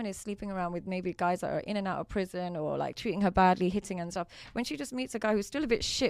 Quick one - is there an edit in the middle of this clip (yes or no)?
no